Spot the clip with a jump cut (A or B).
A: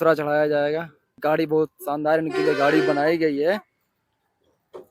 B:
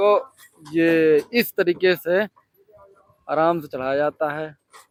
A